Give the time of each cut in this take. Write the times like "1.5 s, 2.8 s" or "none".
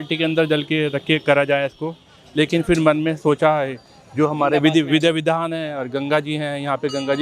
none